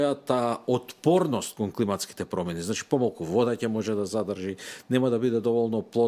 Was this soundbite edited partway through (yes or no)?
no